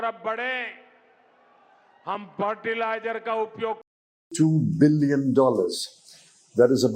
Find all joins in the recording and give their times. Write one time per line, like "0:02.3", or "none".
0:04.3